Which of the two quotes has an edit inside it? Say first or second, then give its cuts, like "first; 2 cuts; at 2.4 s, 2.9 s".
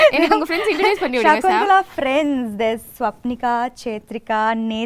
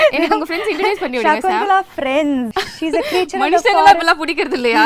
second; 1 cut; at 2.5 s